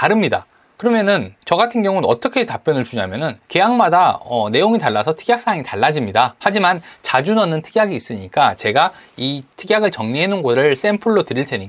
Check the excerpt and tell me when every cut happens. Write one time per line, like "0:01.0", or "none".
0:03.4